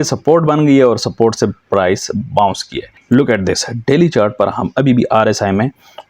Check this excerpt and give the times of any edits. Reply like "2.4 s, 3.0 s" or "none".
2.9 s